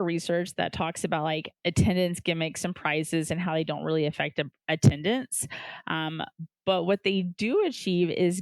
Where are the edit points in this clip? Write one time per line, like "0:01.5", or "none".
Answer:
0:01.5